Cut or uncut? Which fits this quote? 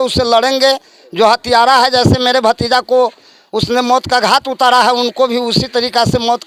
uncut